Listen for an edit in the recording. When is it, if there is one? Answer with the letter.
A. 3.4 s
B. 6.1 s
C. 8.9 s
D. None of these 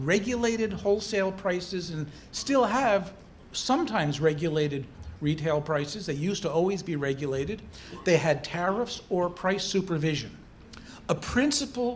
D